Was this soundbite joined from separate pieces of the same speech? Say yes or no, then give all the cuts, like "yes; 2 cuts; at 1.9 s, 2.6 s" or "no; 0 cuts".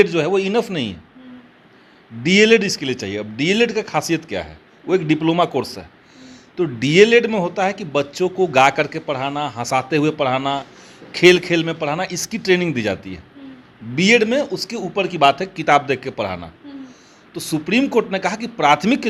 no; 0 cuts